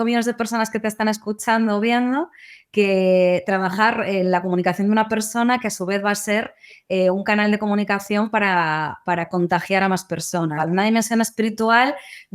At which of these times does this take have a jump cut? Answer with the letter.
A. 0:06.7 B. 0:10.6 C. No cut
B